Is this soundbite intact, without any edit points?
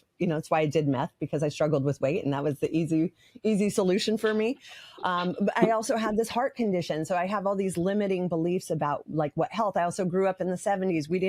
yes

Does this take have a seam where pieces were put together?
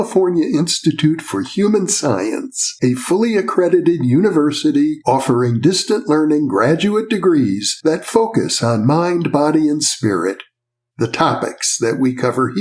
no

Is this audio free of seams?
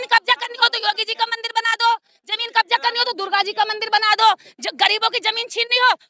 yes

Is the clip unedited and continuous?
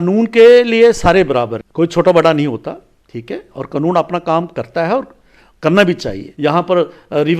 no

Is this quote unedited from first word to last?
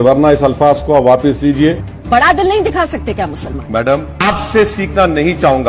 no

